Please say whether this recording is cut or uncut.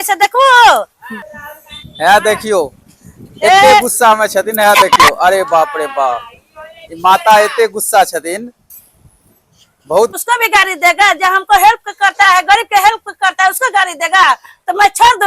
cut